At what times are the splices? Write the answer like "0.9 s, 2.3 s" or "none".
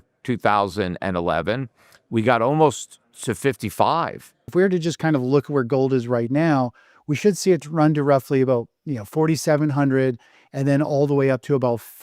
4.5 s